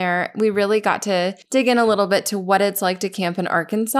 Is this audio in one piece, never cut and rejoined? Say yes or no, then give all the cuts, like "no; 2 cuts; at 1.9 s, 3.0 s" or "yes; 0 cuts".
no; 1 cut; at 1.4 s